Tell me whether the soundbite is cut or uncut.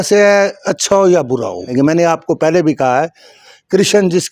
cut